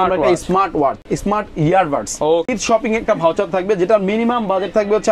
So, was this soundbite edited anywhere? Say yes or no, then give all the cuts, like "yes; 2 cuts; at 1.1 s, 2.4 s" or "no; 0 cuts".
yes; 2 cuts; at 1.1 s, 2.5 s